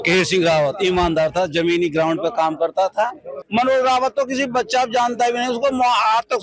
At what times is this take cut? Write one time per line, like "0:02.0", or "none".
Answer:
0:03.4